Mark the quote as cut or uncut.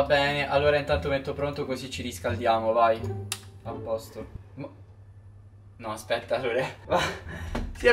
uncut